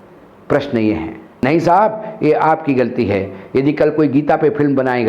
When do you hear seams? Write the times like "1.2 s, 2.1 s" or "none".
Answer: 1.2 s